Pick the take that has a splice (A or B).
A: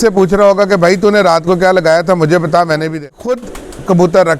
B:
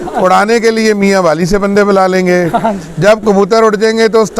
A